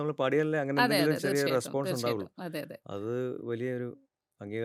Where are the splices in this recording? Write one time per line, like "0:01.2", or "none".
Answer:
none

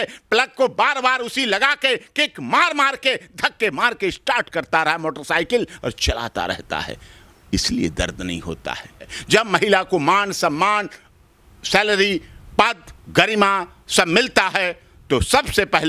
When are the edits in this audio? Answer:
0:09.0

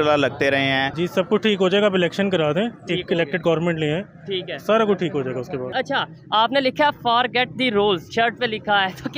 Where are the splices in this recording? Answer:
0:00.9
0:05.7

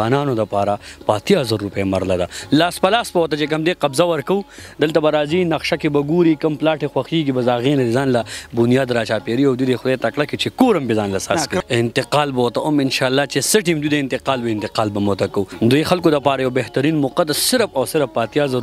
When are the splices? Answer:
0:11.6
0:15.5

